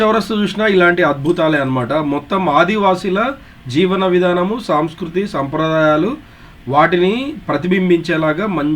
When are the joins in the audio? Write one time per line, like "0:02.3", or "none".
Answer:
none